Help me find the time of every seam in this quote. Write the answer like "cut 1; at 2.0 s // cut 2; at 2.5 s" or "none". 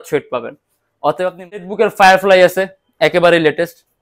cut 1; at 1.6 s